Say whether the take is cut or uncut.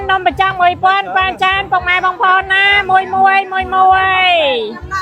uncut